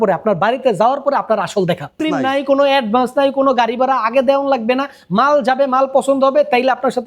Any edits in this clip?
yes; 1 cut; at 2.0 s

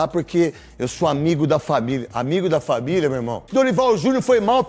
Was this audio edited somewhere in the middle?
yes; 1 cut; at 3.5 s

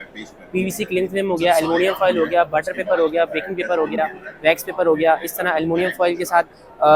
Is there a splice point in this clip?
no; 0 cuts

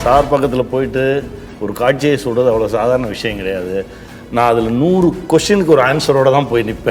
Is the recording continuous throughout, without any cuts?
yes; 0 cuts

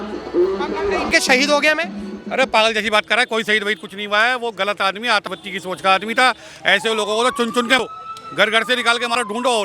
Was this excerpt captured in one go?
no; 1 cut; at 1.1 s

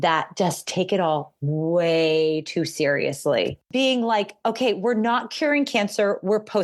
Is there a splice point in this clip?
yes; 1 cut; at 3.6 s

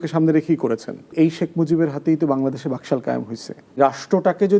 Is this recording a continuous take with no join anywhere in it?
no; 2 cuts; at 1.1 s, 3.8 s

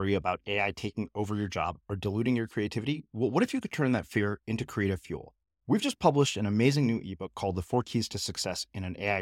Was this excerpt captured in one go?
yes; 0 cuts

